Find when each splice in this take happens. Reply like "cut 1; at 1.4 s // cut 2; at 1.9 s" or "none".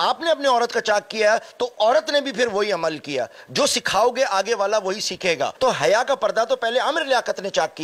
cut 1; at 5.5 s